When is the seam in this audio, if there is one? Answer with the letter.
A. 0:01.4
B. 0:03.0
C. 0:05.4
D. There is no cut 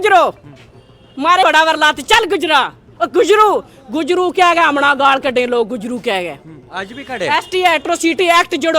A